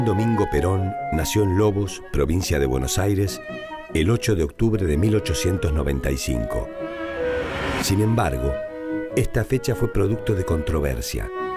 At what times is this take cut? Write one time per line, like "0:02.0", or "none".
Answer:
0:02.0